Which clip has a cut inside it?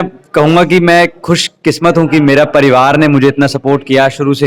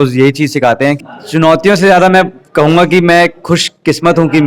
second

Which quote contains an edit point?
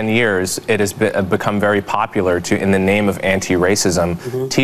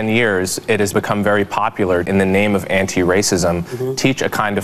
second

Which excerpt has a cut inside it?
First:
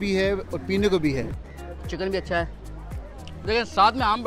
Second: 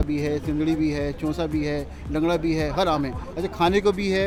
first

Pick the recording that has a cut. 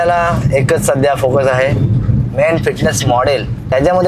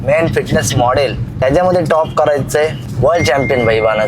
second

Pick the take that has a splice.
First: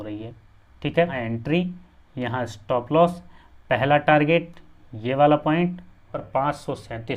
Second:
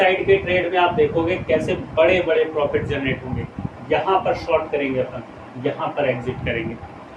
first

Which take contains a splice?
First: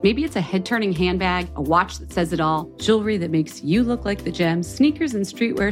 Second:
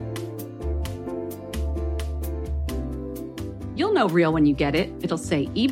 second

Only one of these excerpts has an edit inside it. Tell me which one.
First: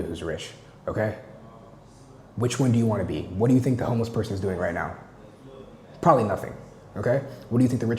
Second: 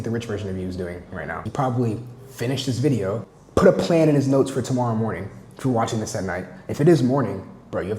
second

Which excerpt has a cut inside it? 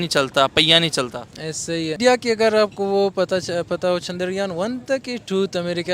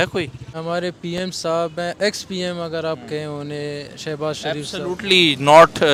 first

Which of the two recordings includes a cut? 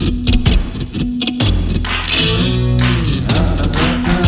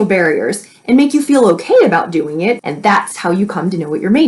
second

